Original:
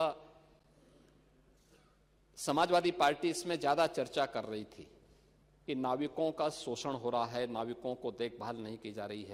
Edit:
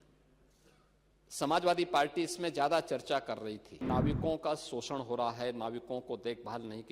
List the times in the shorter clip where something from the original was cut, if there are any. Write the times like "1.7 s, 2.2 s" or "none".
3.8 s